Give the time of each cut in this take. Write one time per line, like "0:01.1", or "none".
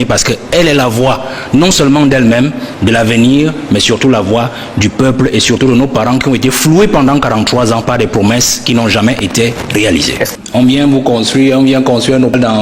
0:10.3